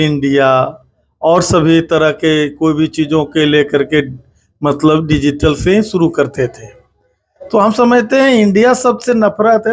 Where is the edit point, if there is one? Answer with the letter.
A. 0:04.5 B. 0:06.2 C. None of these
C